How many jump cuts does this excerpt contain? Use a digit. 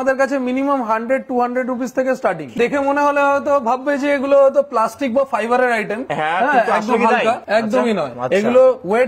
1